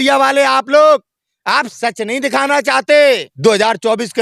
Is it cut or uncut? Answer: cut